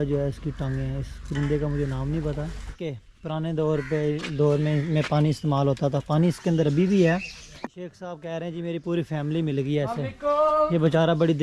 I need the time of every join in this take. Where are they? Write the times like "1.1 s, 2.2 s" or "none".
2.6 s, 7.6 s